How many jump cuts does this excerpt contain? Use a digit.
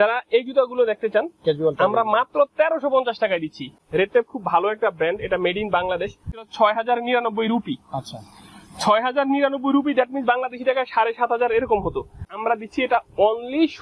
3